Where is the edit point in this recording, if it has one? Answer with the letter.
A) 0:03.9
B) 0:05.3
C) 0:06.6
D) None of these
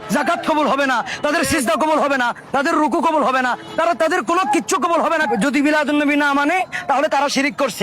B